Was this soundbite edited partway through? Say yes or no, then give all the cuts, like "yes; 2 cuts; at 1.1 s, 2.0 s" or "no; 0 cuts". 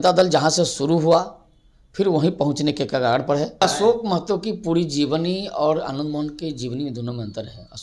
yes; 1 cut; at 3.6 s